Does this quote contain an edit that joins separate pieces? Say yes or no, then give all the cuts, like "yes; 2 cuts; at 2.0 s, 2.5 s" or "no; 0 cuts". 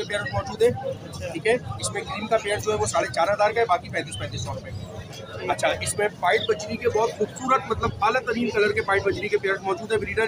no; 0 cuts